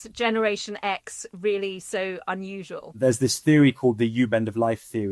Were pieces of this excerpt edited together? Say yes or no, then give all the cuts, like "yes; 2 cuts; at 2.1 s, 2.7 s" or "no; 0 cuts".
yes; 1 cut; at 2.8 s